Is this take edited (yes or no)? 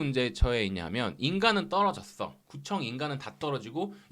no